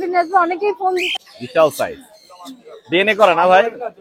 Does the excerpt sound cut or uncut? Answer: cut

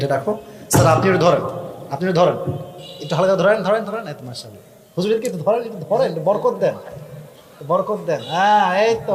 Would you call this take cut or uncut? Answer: uncut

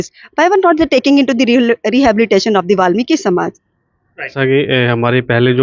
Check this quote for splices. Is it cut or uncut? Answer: cut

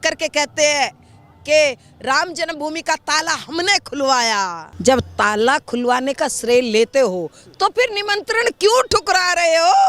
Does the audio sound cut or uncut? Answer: cut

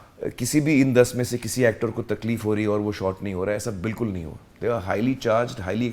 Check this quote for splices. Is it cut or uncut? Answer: uncut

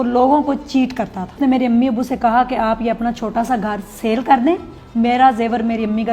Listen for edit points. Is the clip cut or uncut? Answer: cut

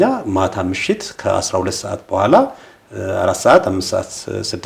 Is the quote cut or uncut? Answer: uncut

